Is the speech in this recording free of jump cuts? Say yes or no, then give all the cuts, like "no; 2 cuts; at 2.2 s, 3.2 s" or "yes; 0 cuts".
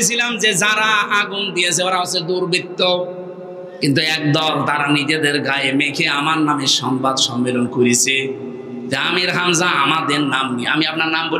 yes; 0 cuts